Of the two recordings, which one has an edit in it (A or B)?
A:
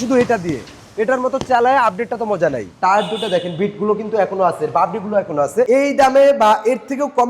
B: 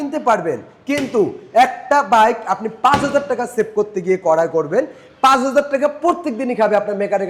A